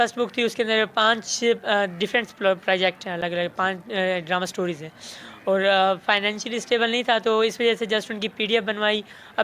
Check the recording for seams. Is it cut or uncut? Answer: uncut